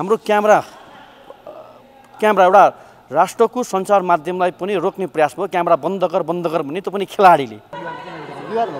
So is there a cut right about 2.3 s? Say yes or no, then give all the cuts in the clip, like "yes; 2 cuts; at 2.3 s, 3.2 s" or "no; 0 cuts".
no; 1 cut; at 7.7 s